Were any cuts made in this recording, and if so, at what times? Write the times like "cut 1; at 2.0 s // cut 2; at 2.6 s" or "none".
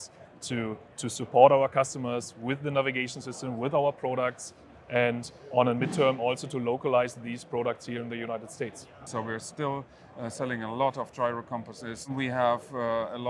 cut 1; at 9.0 s // cut 2; at 12.1 s